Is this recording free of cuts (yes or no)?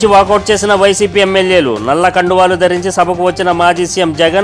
yes